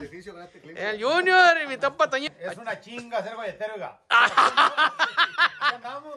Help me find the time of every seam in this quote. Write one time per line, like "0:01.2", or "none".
0:02.2